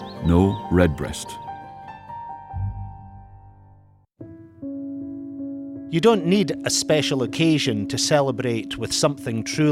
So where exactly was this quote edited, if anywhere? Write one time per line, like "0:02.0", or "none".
0:04.1